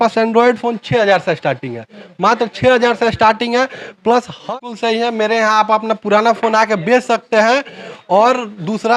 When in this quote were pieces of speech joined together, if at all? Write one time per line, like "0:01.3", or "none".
0:04.5